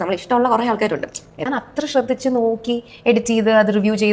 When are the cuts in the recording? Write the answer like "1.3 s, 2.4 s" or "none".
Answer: 1.5 s